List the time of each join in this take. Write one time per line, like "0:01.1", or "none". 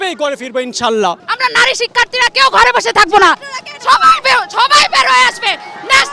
0:01.2